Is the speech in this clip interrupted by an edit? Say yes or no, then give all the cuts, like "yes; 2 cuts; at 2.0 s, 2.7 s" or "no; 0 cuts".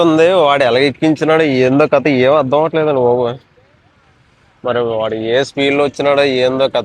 no; 0 cuts